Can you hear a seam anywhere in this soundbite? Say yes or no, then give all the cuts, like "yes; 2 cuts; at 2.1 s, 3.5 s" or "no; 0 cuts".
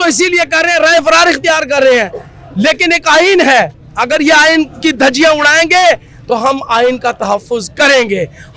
no; 0 cuts